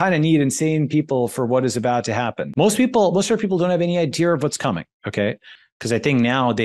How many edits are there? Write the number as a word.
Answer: two